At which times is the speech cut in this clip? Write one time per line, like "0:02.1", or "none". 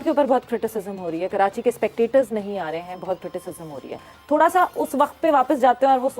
none

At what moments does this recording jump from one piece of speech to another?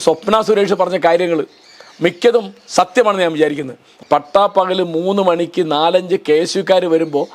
0:03.9

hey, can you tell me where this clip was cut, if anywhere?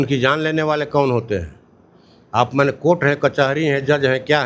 none

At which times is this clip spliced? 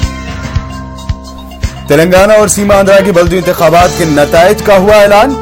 none

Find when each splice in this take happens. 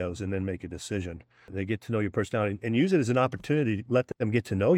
0:01.5

